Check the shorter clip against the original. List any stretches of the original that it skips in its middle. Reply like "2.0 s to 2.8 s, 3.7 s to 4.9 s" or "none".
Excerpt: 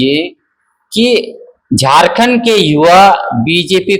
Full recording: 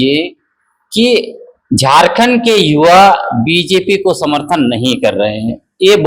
none

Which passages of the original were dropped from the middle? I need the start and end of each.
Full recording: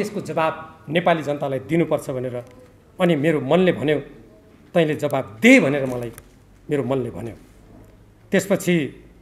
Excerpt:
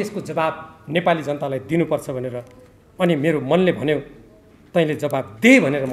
none

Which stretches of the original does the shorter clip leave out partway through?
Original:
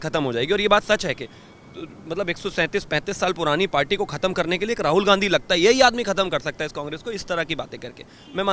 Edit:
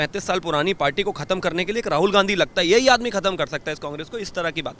none

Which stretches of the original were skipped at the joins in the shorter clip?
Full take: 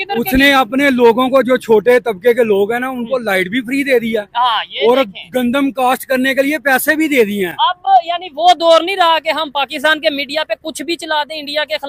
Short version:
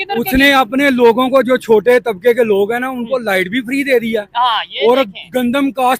none

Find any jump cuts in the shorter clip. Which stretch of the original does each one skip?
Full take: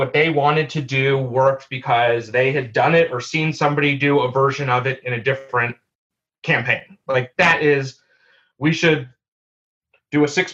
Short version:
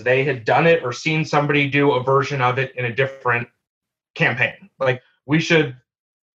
7.3 s to 8.3 s

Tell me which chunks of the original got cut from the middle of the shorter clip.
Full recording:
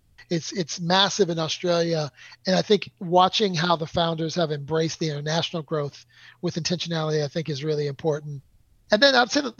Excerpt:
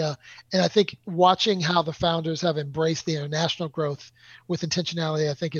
none

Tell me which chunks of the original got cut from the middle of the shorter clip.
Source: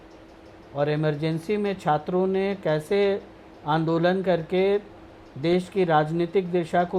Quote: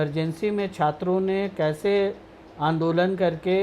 none

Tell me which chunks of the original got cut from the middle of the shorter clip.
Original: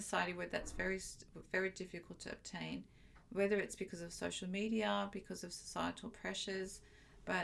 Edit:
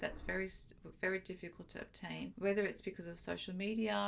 2.8 s to 3.3 s

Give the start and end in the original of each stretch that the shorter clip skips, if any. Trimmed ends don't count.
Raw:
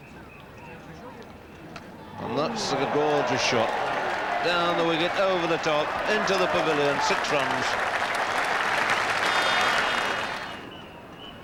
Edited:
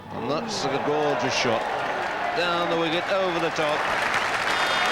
5.9 s to 8.6 s

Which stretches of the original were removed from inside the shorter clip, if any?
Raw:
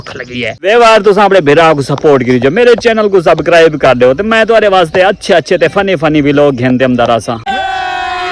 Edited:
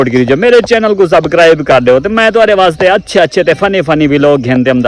none

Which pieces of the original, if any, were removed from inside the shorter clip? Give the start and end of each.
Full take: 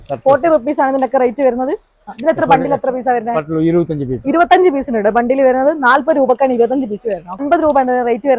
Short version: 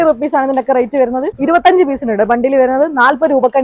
1.8 s to 4.2 s

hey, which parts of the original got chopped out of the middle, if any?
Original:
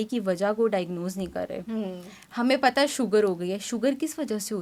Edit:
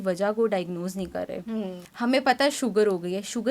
2.0 s to 2.2 s

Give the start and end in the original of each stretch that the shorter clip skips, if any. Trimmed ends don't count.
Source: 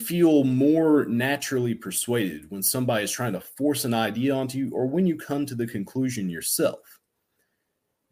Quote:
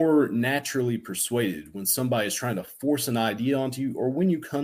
none

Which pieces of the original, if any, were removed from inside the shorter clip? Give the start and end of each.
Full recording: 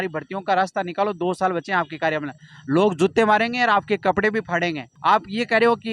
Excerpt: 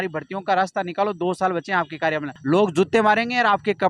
2.3 s to 2.5 s

